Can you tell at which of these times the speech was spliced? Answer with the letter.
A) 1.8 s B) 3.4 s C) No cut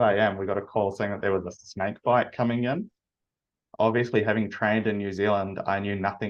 C